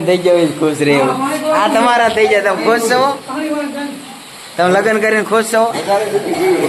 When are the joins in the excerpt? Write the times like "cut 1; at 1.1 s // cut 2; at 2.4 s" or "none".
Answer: none